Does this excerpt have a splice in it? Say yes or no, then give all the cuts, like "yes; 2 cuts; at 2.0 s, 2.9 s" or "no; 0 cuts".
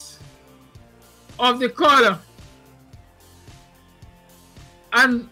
yes; 2 cuts; at 2.3 s, 4.6 s